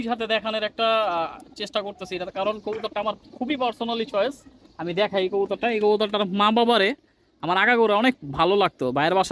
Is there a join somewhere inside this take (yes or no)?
no